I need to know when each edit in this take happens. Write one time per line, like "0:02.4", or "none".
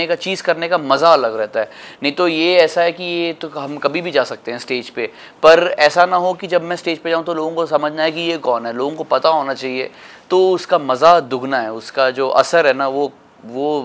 none